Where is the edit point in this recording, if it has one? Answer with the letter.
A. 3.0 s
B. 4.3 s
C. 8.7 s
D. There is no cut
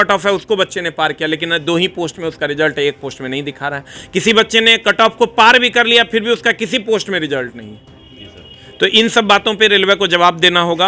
D